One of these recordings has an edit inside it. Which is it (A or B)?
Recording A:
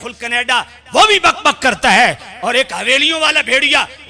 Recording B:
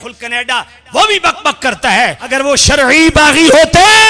B